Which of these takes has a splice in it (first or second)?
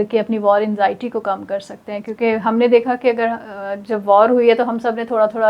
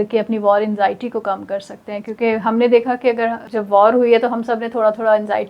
second